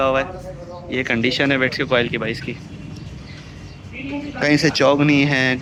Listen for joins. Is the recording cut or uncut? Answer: uncut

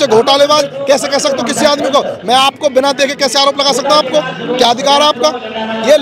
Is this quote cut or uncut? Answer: uncut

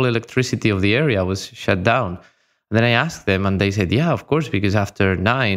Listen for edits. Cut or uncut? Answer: uncut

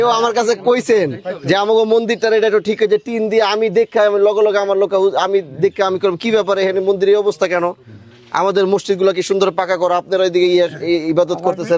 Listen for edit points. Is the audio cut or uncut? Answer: uncut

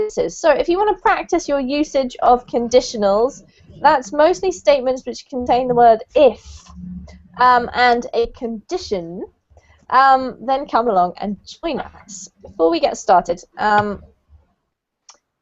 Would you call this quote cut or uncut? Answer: uncut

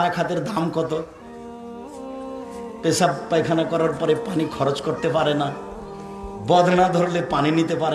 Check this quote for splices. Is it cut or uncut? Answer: uncut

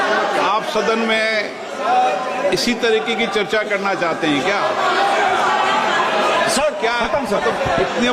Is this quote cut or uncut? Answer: uncut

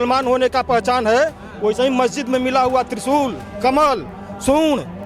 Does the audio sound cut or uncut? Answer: uncut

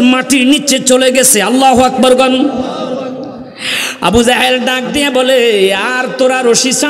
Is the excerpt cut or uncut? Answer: uncut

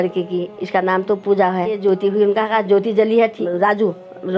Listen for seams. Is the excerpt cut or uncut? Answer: cut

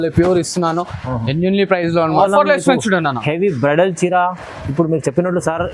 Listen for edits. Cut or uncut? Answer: cut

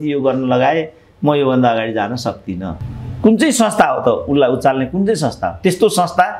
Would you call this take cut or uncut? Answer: cut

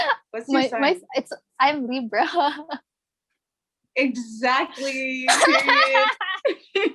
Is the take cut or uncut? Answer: uncut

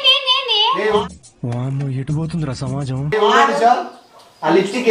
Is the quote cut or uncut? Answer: cut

